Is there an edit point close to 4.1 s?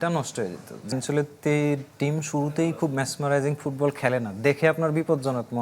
no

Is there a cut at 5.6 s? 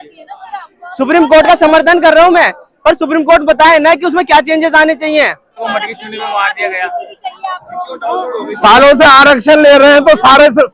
yes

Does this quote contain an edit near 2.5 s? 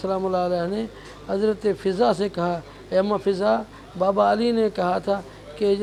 no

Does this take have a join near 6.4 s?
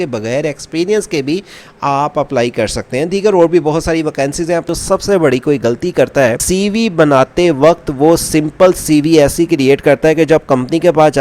yes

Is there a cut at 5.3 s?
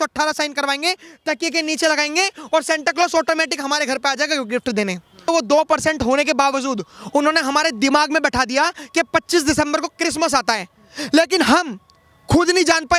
yes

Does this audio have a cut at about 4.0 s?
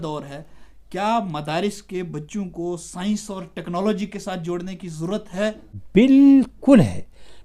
no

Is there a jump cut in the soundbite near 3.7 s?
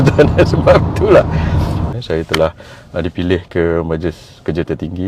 no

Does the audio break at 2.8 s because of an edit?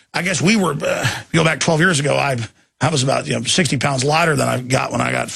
yes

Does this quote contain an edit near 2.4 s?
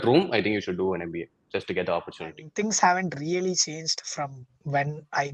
yes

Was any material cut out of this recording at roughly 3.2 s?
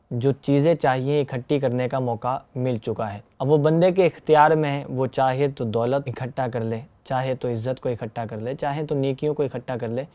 yes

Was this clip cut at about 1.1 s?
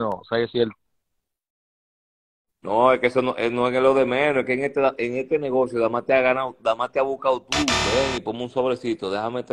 no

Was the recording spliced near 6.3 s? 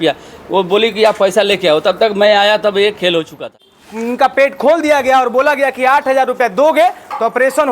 no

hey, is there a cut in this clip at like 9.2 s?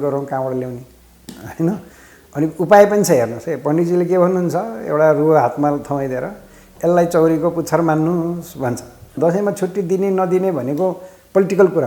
yes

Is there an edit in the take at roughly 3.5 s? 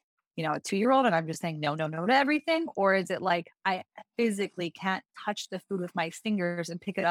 no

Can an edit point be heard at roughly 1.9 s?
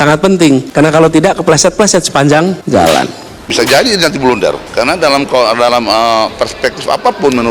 no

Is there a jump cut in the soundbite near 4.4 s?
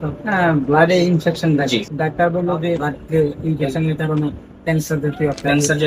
no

